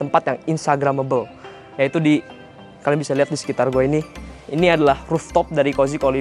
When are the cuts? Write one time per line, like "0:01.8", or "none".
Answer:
none